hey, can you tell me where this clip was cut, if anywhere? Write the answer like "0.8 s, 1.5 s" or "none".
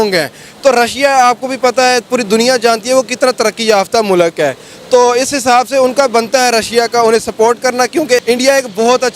8.2 s